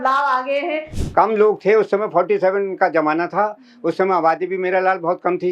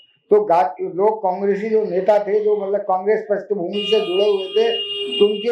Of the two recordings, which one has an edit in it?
first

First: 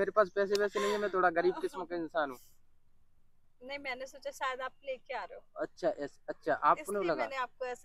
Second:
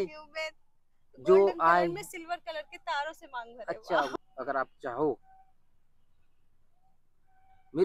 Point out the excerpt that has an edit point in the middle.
second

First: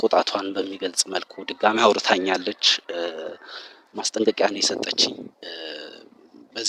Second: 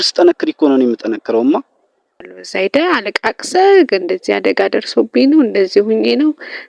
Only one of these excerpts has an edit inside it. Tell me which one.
second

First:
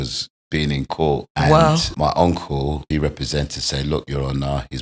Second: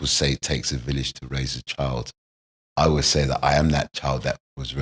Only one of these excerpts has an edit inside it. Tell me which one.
first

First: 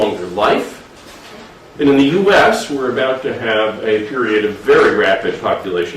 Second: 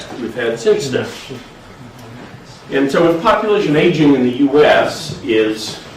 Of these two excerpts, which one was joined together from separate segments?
first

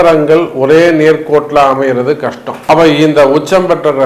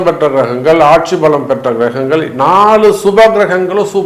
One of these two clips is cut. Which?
first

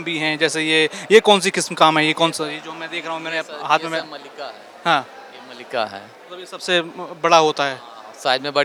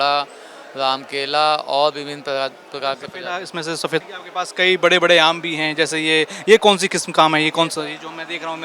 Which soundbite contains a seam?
second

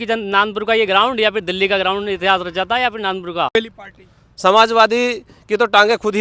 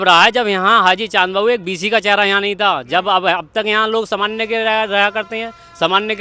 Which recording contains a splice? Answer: first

